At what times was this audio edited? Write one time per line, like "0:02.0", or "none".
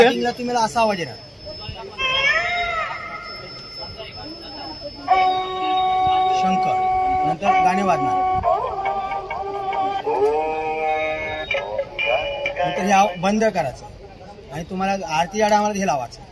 none